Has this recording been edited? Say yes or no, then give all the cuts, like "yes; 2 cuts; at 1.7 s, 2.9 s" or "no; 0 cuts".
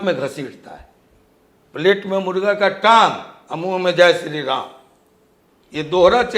no; 0 cuts